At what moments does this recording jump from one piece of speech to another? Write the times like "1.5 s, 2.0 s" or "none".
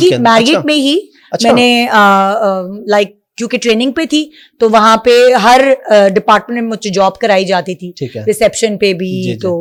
none